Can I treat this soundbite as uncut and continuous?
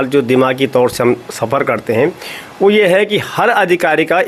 yes; 0 cuts

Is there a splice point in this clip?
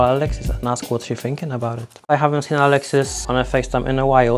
no; 0 cuts

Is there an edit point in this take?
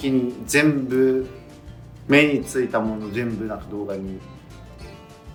no; 0 cuts

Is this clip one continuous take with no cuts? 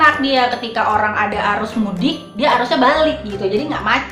yes; 0 cuts

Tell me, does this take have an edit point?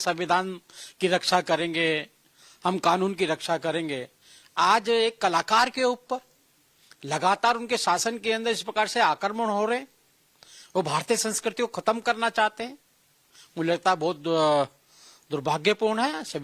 yes; 1 cut; at 8.2 s

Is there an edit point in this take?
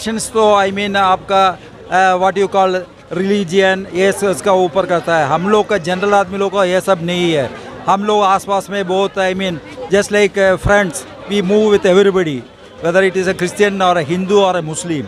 no; 0 cuts

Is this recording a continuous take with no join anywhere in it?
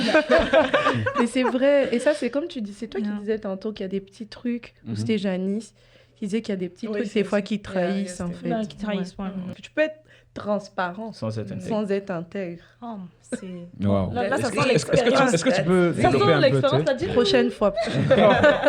no; 1 cut; at 9.6 s

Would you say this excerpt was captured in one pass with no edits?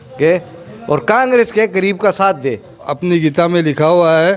no; 1 cut; at 2.9 s

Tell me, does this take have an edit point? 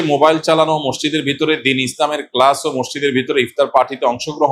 no; 0 cuts

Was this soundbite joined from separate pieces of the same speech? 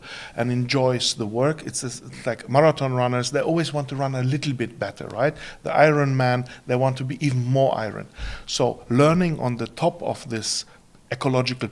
no; 0 cuts

